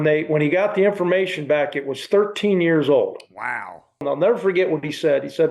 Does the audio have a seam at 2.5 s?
no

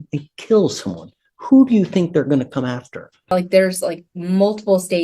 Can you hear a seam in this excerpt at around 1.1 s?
no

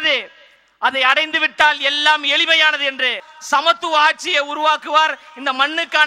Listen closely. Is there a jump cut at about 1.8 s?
no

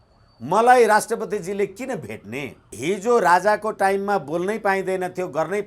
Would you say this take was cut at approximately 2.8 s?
yes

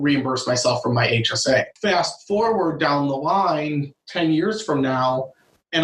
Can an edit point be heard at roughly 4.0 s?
no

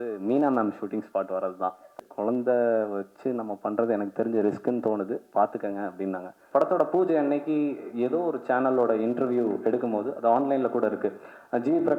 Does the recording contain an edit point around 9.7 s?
no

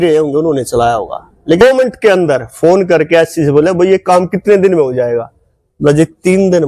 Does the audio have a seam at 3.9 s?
no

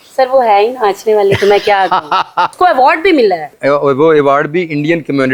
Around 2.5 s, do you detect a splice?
yes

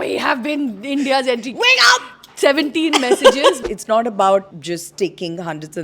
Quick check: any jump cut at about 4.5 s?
yes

